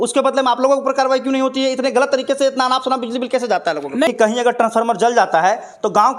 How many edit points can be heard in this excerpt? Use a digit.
1